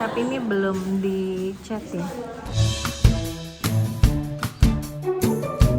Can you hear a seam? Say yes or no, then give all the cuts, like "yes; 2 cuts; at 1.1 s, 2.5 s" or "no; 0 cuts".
yes; 1 cut; at 2.6 s